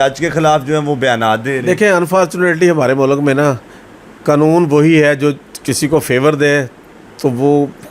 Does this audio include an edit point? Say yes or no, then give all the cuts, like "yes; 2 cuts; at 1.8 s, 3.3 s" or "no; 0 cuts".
no; 0 cuts